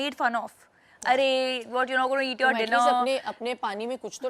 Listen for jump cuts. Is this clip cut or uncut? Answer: uncut